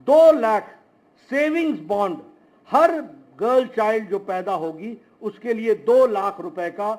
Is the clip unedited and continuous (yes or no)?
yes